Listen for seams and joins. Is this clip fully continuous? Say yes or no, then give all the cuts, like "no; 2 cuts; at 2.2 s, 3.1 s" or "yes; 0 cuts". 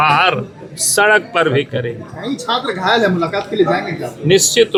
yes; 0 cuts